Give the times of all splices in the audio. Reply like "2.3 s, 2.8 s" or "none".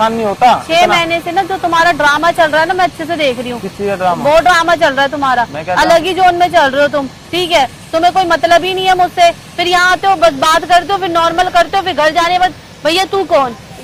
none